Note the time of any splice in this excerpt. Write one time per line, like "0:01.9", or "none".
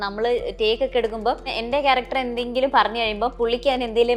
0:01.5